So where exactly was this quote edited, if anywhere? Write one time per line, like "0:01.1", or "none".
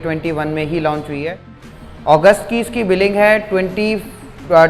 none